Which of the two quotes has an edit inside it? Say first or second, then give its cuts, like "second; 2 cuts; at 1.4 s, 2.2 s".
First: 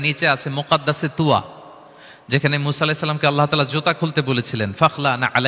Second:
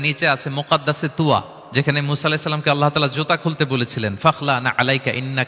second; 1 cut; at 1.6 s